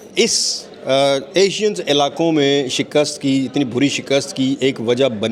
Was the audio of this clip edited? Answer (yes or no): no